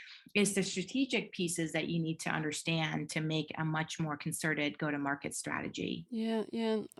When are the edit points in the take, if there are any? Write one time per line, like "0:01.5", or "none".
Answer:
none